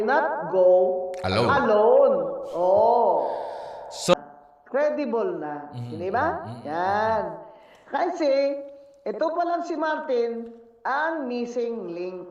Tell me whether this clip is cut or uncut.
cut